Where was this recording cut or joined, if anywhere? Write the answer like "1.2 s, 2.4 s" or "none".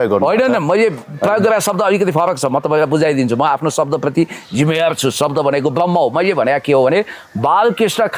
none